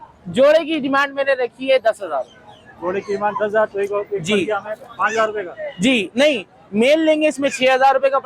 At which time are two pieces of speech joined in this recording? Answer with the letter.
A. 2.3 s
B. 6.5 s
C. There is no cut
C